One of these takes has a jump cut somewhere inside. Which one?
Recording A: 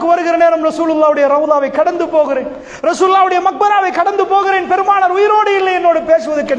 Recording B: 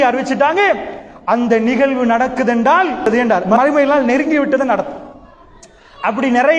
B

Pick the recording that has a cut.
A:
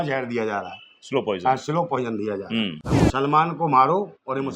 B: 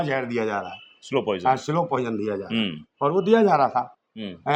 A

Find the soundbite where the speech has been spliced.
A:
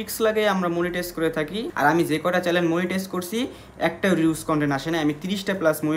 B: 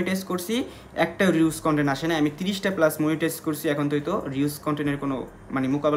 A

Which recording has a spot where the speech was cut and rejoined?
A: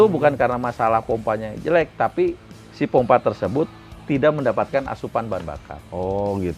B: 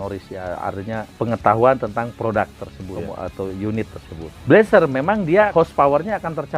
B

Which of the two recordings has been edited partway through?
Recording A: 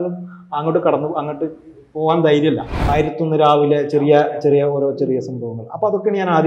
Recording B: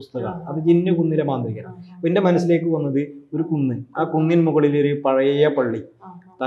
A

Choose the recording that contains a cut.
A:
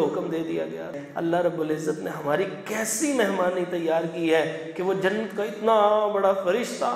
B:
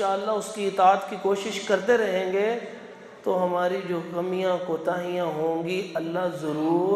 A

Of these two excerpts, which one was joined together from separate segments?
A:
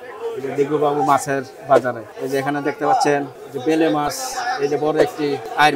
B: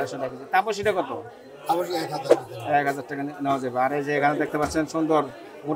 A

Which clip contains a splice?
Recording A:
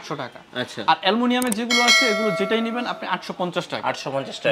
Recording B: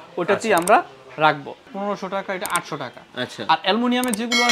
B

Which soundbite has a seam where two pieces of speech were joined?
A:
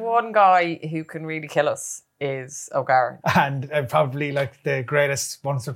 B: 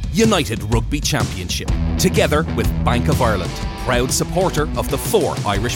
A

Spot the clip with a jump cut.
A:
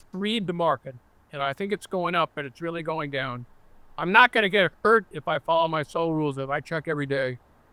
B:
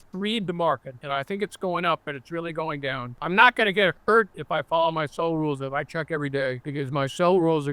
B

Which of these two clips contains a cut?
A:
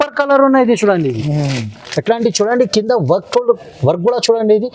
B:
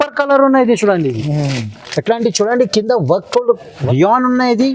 B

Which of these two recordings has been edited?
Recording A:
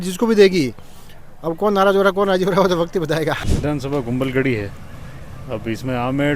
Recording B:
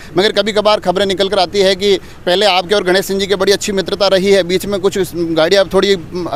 A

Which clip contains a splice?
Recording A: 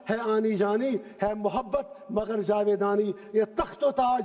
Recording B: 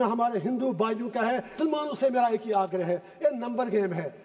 B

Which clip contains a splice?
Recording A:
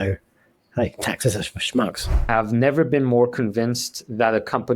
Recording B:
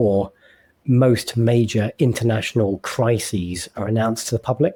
A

